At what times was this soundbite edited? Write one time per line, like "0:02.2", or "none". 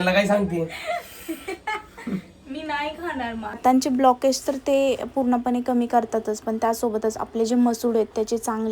0:03.6